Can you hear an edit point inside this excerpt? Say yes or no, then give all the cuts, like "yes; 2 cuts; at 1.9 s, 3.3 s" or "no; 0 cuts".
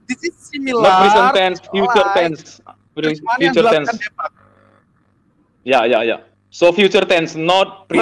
no; 0 cuts